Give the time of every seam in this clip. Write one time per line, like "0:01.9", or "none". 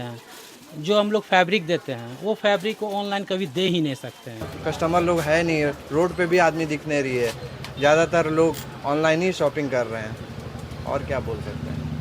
0:04.5